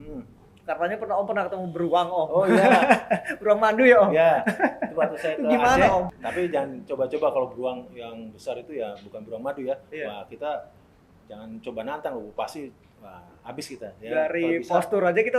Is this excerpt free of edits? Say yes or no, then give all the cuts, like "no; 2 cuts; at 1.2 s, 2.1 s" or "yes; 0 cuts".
no; 1 cut; at 6.2 s